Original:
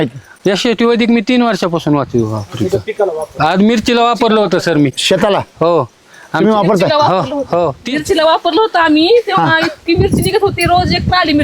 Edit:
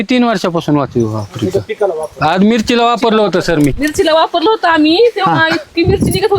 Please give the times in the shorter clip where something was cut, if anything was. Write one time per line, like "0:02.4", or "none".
0:03.8